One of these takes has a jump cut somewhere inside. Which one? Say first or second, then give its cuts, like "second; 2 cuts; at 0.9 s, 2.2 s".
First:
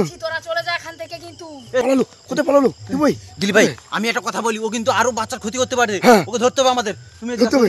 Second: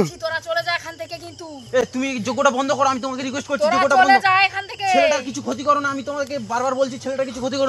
first; 1 cut; at 1.7 s